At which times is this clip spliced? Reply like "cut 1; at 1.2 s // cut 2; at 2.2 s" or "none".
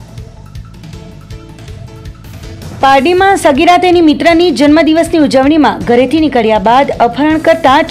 none